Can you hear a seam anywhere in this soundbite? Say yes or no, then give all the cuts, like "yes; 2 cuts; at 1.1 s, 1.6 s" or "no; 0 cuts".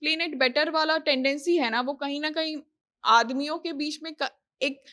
no; 0 cuts